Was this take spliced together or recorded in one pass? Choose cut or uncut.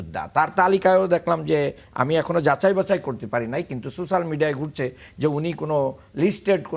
uncut